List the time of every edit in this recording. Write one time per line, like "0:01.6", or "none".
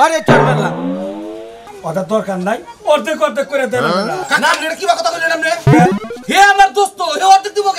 0:01.6